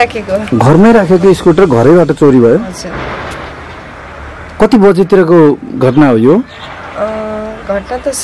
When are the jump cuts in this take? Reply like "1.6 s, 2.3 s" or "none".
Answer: none